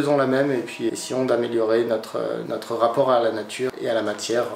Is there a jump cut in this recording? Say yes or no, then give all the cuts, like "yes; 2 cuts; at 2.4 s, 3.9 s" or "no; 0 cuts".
yes; 3 cuts; at 0.9 s, 2.4 s, 3.7 s